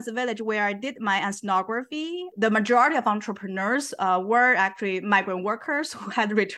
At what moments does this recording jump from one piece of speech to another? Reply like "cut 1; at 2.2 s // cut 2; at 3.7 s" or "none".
none